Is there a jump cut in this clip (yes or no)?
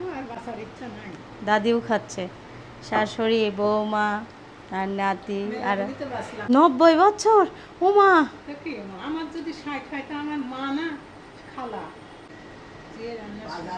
yes